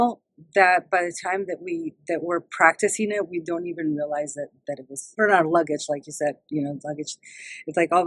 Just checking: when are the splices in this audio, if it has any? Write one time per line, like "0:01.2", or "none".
0:05.1